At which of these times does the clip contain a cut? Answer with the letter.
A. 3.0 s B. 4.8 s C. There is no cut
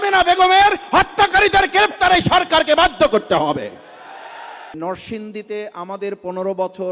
B